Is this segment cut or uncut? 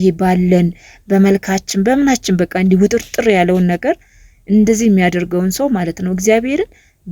uncut